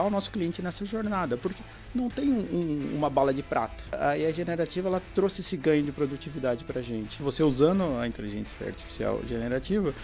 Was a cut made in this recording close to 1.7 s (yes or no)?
no